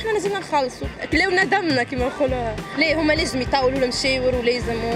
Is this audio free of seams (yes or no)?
no